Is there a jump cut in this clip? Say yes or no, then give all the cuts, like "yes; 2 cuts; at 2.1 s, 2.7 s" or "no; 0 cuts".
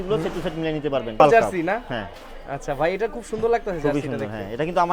yes; 1 cut; at 1.2 s